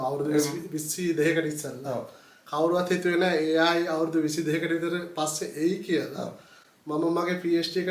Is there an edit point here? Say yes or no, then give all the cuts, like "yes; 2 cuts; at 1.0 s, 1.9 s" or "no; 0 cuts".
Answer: no; 0 cuts